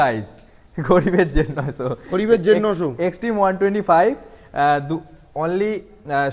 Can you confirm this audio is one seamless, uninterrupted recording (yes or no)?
yes